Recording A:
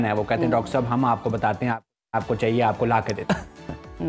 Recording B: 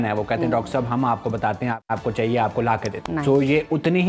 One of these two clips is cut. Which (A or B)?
B